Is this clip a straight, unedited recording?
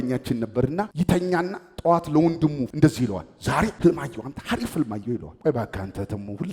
no; 3 cuts; at 0.9 s, 3.7 s, 5.3 s

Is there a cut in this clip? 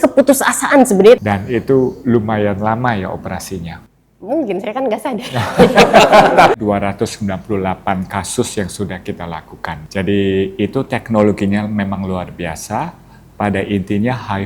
yes; 3 cuts; at 1.2 s, 6.5 s, 9.8 s

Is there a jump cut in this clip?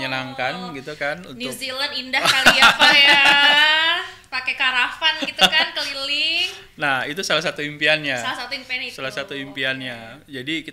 no; 0 cuts

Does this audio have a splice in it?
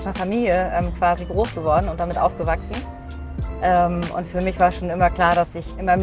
no; 0 cuts

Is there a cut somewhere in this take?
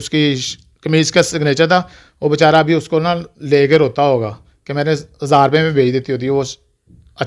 no; 0 cuts

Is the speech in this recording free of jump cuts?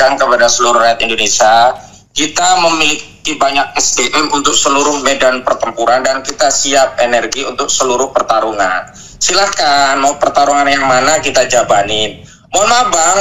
yes; 0 cuts

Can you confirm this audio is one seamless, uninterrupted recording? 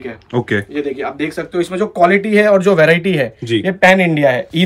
yes; 0 cuts

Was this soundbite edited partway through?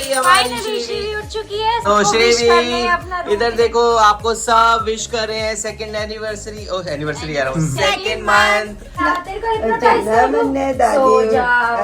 no; 0 cuts

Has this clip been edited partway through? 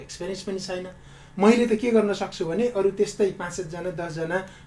no; 0 cuts

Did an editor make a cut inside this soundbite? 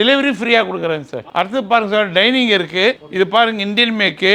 no; 0 cuts

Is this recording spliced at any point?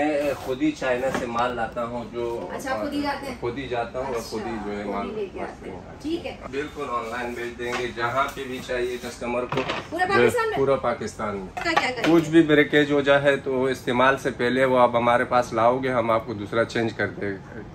yes; 2 cuts; at 6.4 s, 11.6 s

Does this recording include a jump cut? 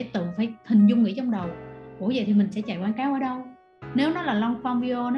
no; 0 cuts

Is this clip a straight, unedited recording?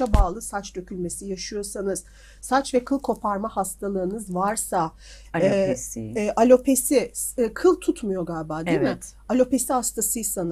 yes; 0 cuts

